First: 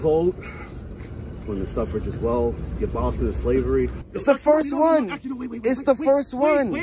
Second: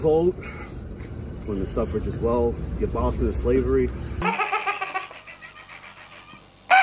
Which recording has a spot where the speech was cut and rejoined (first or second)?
first